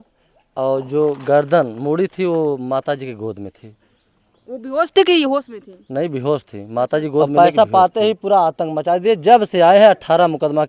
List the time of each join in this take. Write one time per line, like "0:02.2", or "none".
0:07.3